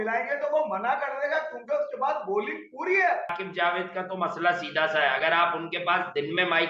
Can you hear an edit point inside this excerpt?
yes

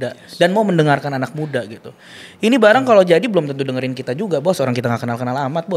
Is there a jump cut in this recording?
no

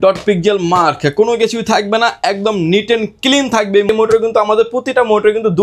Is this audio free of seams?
no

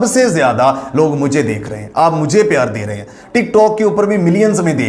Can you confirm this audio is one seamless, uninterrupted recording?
yes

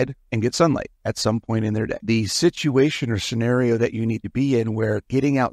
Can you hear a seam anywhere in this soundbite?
no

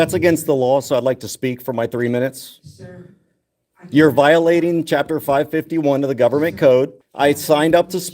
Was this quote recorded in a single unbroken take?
no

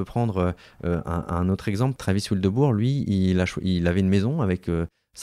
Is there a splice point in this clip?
yes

